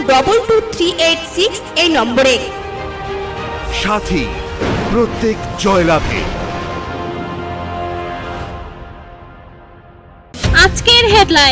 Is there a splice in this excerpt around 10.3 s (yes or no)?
yes